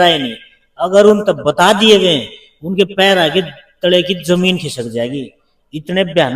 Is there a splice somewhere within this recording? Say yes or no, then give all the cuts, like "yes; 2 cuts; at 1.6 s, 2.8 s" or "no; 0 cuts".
no; 0 cuts